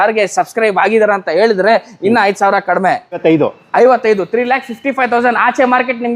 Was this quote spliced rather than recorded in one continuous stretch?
yes; 1 cut; at 3.2 s

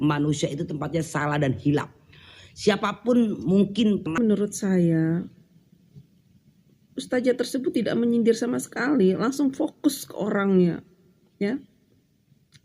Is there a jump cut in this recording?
yes; 1 cut; at 4.2 s

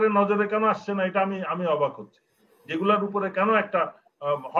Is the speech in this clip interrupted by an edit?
no; 0 cuts

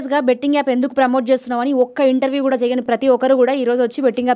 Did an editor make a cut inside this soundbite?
no; 0 cuts

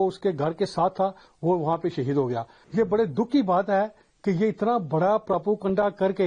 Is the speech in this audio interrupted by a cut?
yes; 1 cut; at 2.5 s

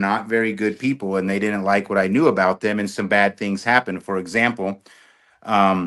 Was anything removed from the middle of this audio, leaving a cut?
no; 0 cuts

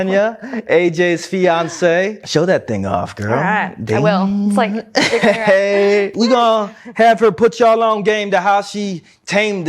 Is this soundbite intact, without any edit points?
no; 2 cuts; at 2.2 s, 6.1 s

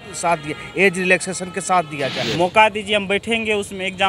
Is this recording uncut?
no; 1 cut; at 2.2 s

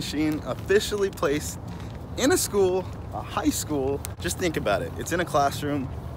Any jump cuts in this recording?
no; 0 cuts

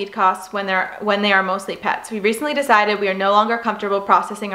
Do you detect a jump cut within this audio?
no; 0 cuts

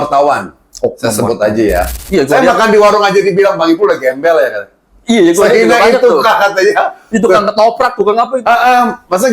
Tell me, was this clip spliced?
yes; 1 cut; at 2.0 s

